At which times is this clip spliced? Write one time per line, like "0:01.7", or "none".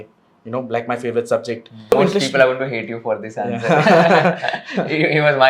0:01.9